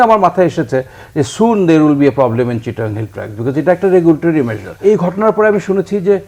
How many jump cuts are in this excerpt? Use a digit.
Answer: 1